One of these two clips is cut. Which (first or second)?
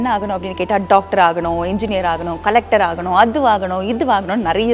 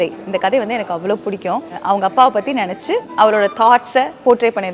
second